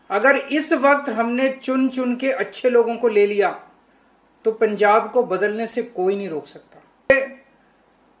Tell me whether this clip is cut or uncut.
cut